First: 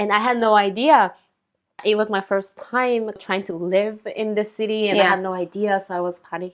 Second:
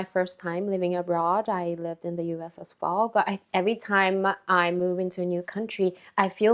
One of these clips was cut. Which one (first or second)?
first